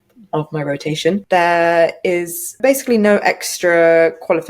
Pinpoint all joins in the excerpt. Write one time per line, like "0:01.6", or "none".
0:01.2
0:02.6

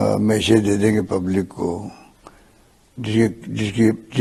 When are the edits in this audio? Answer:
none

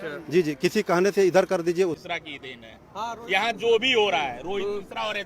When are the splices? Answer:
0:01.9

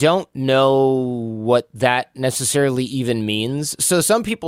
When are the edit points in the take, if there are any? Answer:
none

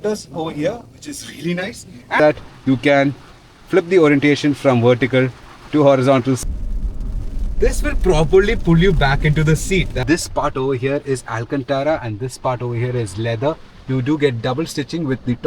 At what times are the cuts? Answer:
0:02.2
0:06.4
0:10.0

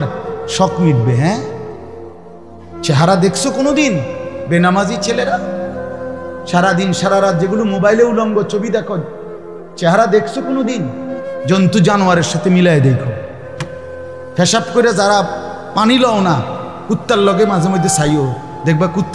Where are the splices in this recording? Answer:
0:01.4
0:02.9

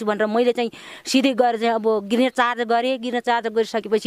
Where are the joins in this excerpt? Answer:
none

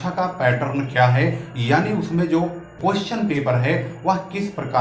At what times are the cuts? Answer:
0:02.7

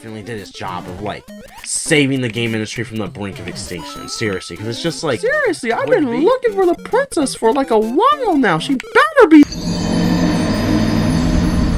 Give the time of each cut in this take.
0:05.2

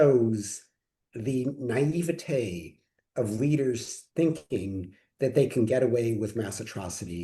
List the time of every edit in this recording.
none

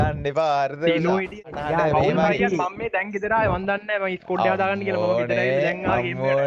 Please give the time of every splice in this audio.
0:01.5

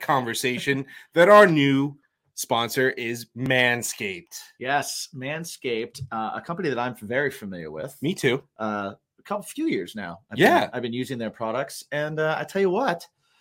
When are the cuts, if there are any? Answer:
none

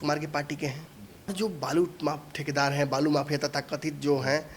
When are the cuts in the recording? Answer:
0:01.3

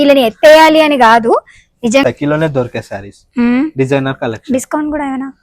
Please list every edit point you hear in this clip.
0:02.0

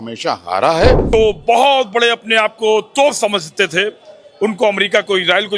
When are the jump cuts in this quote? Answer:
0:01.0

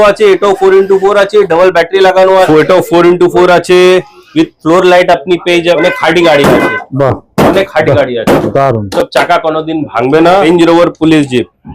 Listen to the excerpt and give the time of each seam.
0:02.5
0:05.8
0:10.4

